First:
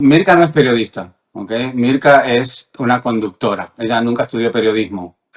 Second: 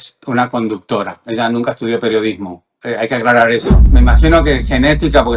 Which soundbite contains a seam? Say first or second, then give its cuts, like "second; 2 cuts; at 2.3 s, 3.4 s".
second; 1 cut; at 3.9 s